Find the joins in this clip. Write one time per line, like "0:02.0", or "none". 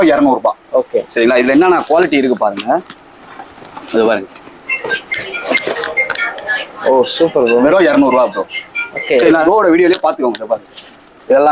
0:09.4